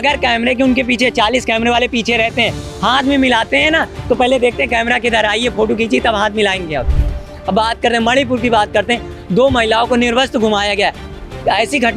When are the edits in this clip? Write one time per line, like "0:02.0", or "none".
none